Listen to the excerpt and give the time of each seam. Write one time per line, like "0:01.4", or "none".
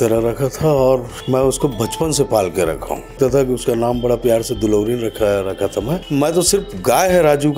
0:01.1
0:03.2
0:06.0